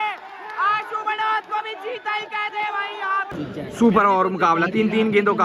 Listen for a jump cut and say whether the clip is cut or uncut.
cut